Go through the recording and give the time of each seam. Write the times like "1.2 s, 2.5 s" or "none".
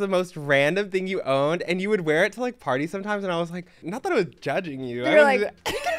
3.9 s